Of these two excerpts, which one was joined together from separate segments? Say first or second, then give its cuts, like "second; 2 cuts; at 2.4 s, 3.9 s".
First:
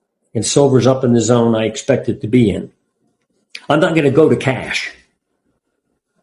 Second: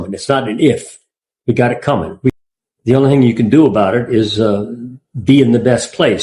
second; 1 cut; at 2.3 s